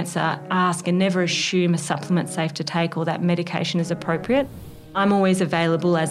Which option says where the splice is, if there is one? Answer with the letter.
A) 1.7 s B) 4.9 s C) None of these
B